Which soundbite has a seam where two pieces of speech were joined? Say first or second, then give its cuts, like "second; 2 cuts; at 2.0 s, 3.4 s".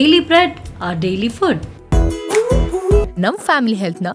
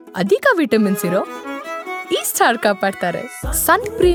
first; 1 cut; at 1.7 s